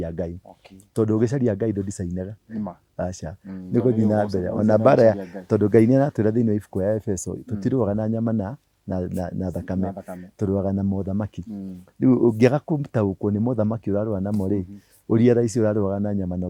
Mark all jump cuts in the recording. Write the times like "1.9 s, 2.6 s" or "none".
none